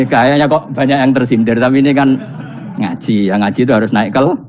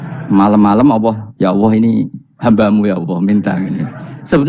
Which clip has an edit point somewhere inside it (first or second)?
second